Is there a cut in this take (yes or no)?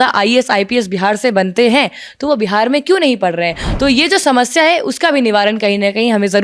no